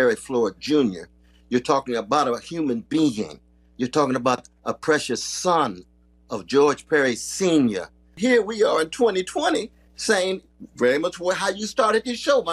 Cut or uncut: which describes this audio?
cut